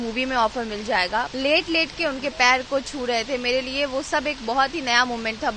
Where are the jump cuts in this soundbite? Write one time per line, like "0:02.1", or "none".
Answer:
0:01.3